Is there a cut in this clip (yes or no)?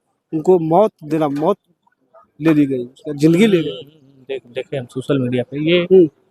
no